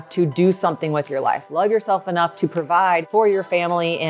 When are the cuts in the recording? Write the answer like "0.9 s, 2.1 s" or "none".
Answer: 3.1 s